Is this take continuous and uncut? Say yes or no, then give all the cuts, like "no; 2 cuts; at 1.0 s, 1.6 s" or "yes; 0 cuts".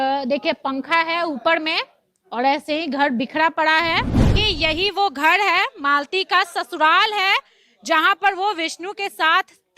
no; 1 cut; at 4.3 s